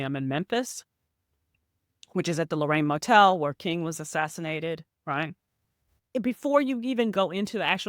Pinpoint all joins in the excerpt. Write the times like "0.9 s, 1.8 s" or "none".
6.1 s